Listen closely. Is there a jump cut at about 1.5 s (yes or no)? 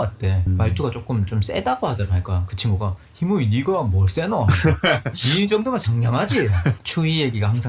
no